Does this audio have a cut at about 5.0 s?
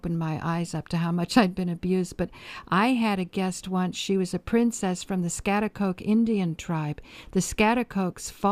yes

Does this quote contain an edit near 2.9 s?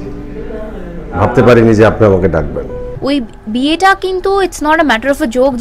yes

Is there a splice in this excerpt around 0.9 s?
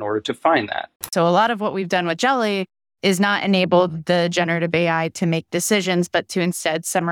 yes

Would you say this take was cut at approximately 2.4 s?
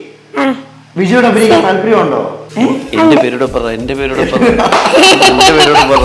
yes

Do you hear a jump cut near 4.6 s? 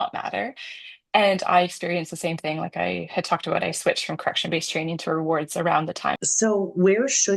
no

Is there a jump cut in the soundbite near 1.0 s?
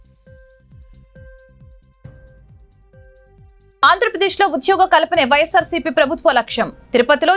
yes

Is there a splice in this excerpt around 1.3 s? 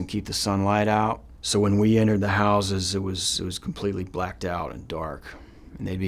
yes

